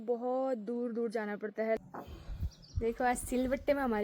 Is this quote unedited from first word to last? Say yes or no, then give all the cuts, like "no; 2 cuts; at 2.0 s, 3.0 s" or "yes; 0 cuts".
no; 1 cut; at 1.8 s